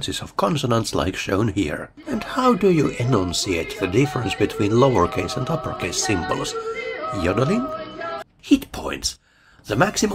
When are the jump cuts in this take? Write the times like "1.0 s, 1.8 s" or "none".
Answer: 1.9 s, 8.1 s